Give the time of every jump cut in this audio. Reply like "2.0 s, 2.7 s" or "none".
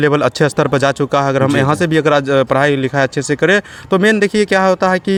none